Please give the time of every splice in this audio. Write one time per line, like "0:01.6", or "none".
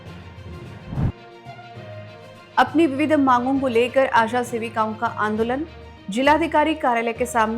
0:01.1